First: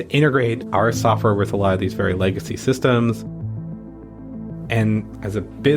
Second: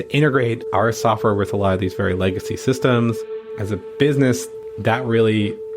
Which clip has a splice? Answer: second; 1 cut; at 3.5 s

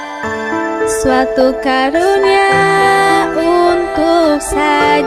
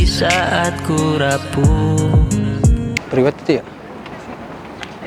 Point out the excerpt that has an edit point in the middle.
second; 1 cut; at 3.0 s

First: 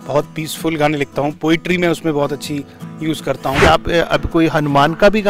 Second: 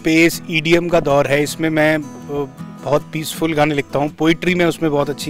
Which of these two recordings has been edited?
first; 1 cut; at 3.6 s

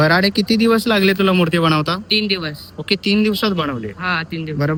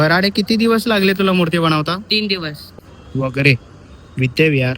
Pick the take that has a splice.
second; 1 cut; at 2.8 s

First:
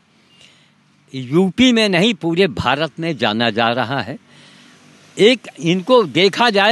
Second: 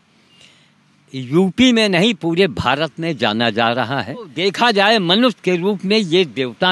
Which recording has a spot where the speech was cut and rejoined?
second; 1 cut; at 4.3 s

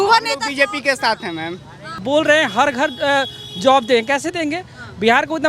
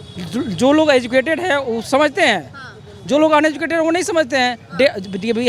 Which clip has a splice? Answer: first; 1 cut; at 1.9 s

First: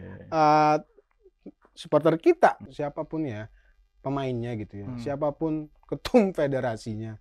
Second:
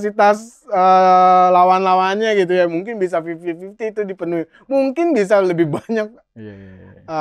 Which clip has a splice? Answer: first; 1 cut; at 2.6 s

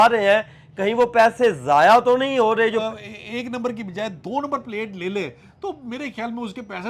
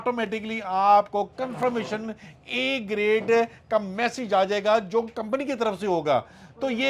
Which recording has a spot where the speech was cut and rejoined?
first; 1 cut; at 2.8 s

